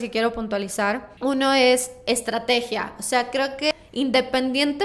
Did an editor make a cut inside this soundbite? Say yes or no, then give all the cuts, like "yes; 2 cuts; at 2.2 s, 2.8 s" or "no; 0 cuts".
yes; 2 cuts; at 1.1 s, 3.7 s